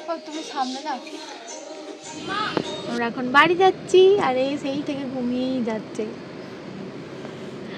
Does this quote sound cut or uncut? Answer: cut